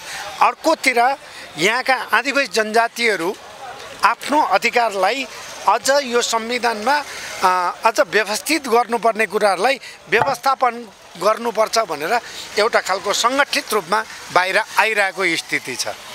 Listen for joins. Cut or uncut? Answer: uncut